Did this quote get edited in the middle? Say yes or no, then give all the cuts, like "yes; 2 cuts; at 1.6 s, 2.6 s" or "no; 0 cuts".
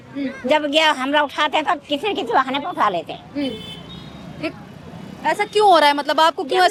no; 0 cuts